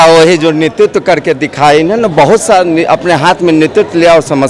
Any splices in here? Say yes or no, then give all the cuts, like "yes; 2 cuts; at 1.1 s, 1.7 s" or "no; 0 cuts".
no; 0 cuts